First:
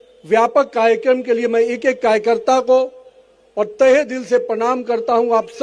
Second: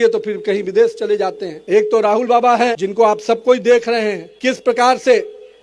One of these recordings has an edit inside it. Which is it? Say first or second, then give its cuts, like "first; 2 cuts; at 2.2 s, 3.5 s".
second; 3 cuts; at 1.5 s, 2.8 s, 4.3 s